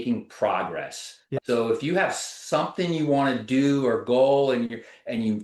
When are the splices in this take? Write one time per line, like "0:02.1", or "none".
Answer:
none